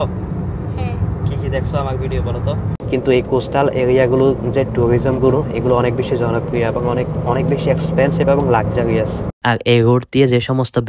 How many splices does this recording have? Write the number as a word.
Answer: two